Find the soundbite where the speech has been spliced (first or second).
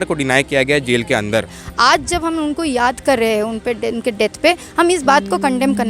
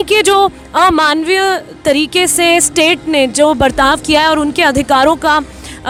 first